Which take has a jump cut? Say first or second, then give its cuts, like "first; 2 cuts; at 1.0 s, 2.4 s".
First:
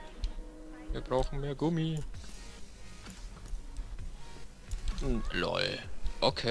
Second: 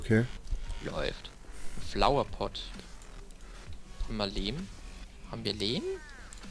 first; 1 cut; at 3.2 s